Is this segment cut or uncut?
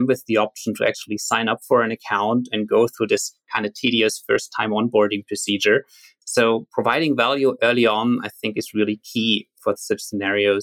cut